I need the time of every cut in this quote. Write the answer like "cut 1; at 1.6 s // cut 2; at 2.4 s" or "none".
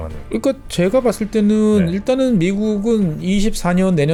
none